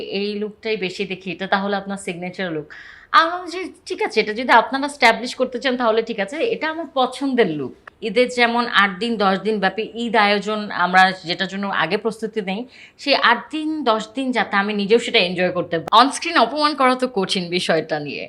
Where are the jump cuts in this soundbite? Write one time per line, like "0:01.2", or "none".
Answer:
0:07.9
0:15.8